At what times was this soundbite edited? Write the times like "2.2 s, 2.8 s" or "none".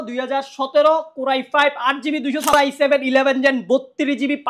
2.5 s